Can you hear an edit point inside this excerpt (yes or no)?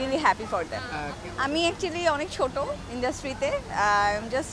yes